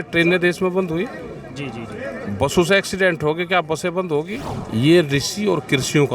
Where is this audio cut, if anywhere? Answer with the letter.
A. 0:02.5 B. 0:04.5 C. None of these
B